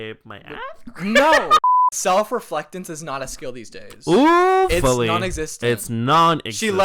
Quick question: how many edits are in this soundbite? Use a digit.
1